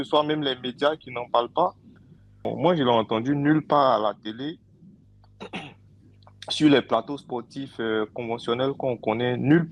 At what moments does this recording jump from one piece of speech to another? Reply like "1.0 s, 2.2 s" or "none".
2.4 s